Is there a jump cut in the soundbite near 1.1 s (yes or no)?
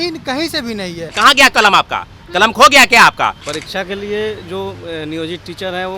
yes